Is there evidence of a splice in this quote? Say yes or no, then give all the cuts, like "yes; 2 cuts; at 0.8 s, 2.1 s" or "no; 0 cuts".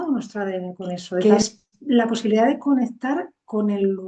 yes; 1 cut; at 1.2 s